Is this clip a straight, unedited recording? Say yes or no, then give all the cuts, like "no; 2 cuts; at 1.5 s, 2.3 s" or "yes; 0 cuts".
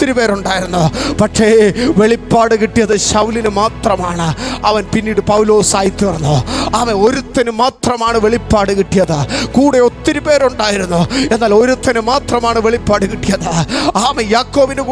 yes; 0 cuts